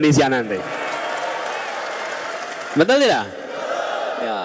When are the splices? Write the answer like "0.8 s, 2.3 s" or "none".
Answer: none